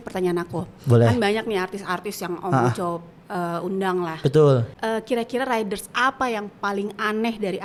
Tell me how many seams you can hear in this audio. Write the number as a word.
zero